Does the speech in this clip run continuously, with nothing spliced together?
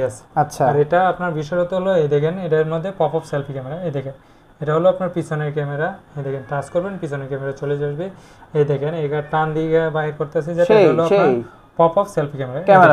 yes; 0 cuts

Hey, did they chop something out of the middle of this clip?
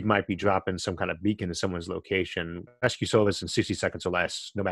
yes; 1 cut; at 2.7 s

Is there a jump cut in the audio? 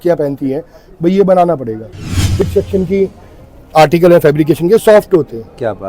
yes; 1 cut; at 2.4 s

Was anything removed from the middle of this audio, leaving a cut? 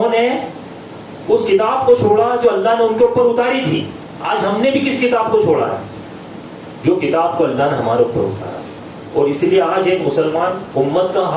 no; 0 cuts

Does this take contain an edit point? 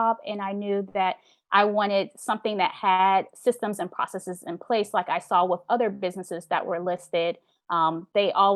no; 0 cuts

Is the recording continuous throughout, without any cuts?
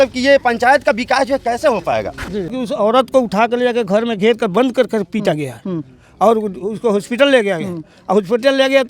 no; 1 cut; at 2.5 s

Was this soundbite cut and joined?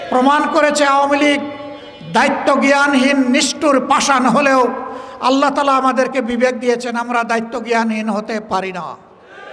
no; 0 cuts

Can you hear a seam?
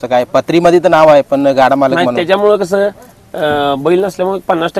no; 0 cuts

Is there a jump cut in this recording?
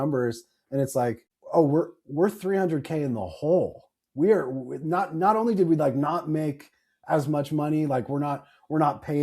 yes; 1 cut; at 1.3 s

